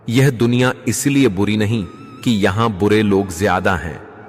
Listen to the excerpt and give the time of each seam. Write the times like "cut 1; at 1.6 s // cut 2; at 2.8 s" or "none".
none